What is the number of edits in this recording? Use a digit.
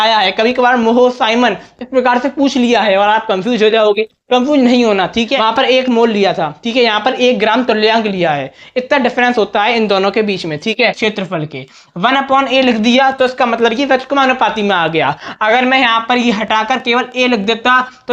2